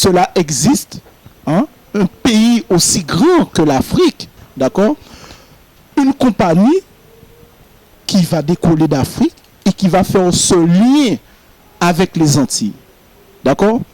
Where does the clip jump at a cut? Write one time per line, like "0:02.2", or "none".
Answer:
0:04.8